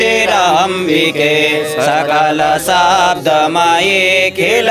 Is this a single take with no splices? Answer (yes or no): yes